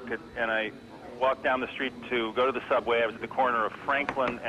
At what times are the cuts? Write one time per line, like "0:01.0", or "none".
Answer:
0:01.6